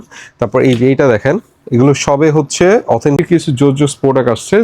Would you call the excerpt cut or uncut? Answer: cut